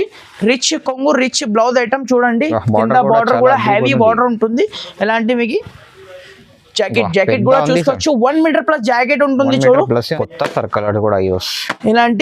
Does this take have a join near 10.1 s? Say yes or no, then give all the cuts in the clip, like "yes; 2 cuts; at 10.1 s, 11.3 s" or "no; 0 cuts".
yes; 1 cut; at 10.1 s